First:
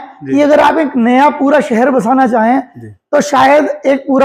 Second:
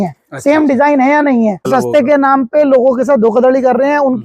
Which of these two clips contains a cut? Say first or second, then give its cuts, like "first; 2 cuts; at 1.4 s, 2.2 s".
second; 1 cut; at 1.7 s